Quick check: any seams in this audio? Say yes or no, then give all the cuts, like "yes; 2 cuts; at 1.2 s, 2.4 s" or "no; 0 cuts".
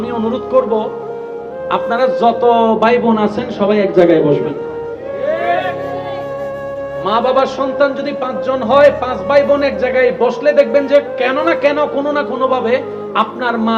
no; 0 cuts